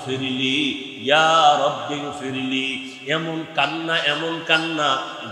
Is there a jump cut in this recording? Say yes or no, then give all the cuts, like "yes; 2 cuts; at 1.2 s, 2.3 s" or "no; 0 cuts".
no; 0 cuts